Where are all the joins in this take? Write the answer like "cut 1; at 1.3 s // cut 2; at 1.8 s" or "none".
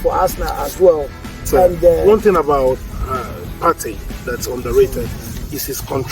cut 1; at 2.0 s

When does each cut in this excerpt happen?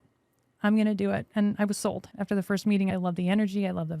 cut 1; at 2.9 s

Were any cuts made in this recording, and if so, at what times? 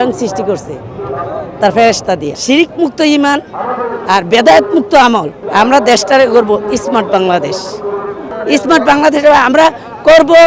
cut 1; at 2.3 s // cut 2; at 5.4 s // cut 3; at 8.3 s

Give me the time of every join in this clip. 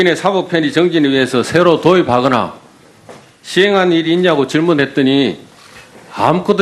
none

